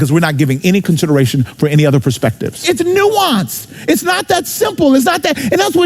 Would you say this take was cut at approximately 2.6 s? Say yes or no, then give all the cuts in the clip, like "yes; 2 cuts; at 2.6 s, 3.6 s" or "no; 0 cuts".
yes; 1 cut; at 2.6 s